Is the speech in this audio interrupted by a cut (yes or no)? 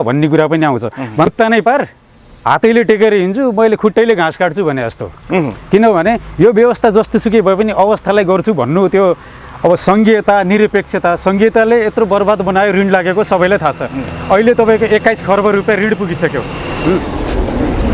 yes